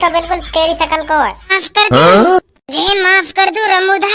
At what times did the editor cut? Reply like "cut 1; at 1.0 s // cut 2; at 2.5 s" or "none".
cut 1; at 1.6 s